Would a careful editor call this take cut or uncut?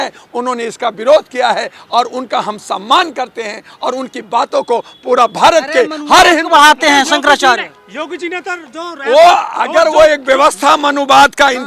uncut